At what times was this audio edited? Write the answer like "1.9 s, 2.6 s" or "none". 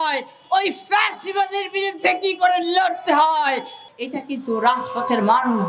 3.8 s